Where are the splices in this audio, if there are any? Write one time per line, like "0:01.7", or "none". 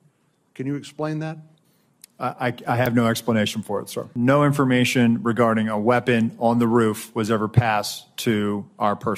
0:04.0